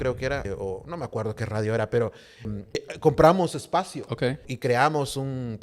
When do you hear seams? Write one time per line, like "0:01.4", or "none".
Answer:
0:04.5